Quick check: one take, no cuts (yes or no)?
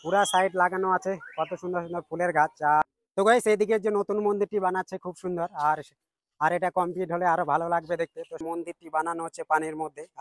no